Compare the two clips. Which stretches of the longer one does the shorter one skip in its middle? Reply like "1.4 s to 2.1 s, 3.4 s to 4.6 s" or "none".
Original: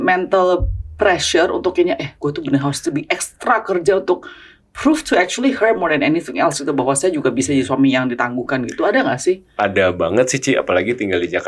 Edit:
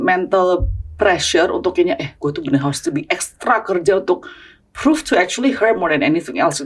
none